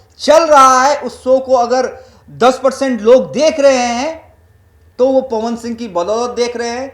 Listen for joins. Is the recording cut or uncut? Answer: uncut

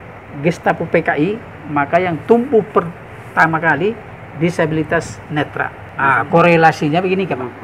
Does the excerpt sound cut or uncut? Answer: cut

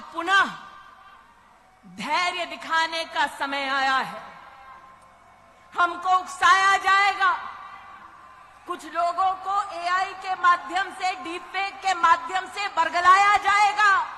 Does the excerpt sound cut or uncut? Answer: uncut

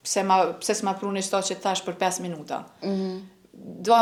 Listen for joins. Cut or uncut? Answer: uncut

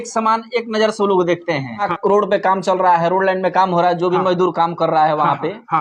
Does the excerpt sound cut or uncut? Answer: cut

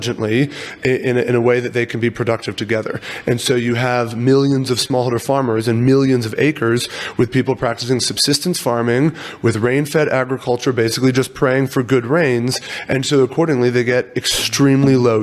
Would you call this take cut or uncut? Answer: uncut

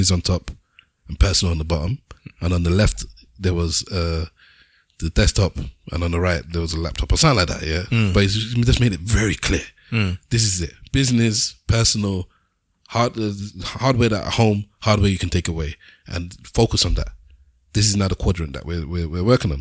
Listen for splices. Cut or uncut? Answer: uncut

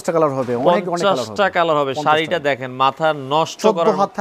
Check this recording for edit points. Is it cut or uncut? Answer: uncut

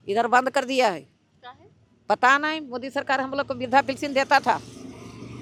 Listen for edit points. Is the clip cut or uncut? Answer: uncut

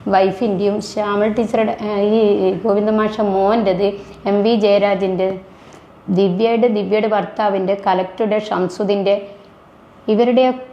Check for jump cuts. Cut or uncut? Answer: uncut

